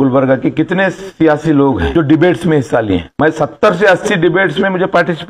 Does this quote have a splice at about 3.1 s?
yes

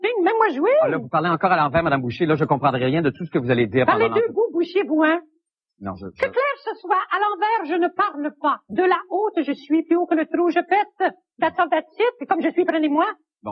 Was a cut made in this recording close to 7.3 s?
no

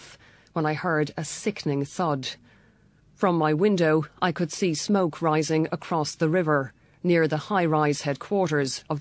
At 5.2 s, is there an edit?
no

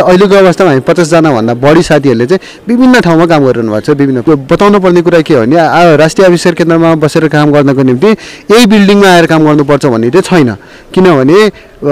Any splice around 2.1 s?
no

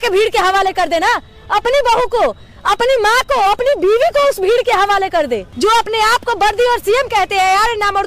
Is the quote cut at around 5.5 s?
yes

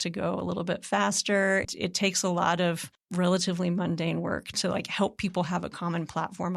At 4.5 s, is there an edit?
yes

